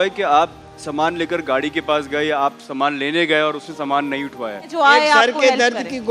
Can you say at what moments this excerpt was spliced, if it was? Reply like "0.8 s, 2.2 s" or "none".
4.7 s